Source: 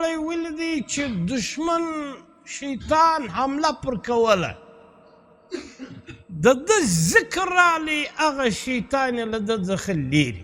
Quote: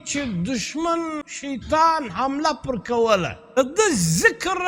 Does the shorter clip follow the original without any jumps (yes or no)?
no